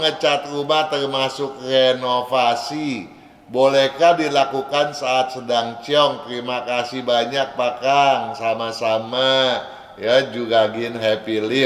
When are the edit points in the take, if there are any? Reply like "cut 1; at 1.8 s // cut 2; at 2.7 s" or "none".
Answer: none